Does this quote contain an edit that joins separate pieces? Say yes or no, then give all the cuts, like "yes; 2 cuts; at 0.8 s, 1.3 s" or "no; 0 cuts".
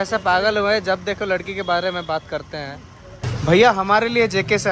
yes; 1 cut; at 3.2 s